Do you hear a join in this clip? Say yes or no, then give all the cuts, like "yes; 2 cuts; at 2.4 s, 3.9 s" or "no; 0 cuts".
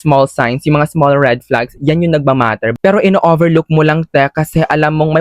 yes; 1 cut; at 2.7 s